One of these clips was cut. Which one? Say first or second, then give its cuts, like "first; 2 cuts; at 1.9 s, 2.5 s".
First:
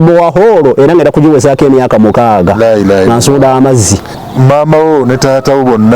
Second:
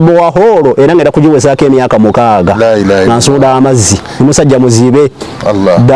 first; 1 cut; at 4.0 s